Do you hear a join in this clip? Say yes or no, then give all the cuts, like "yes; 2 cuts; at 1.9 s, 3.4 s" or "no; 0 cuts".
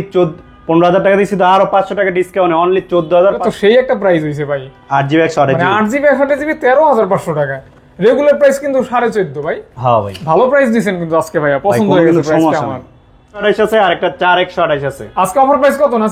yes; 2 cuts; at 3.4 s, 13.4 s